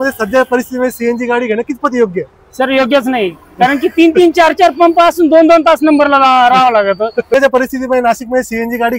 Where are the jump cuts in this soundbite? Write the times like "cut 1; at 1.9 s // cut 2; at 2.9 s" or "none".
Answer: cut 1; at 7.3 s